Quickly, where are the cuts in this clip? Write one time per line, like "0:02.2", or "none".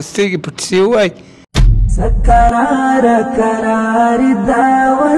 0:02.3

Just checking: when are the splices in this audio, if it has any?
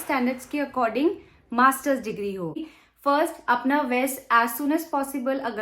0:02.8

